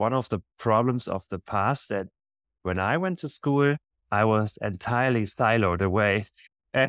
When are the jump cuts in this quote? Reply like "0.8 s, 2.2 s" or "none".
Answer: none